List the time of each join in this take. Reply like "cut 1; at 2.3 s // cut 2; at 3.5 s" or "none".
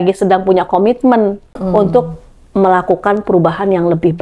cut 1; at 1.6 s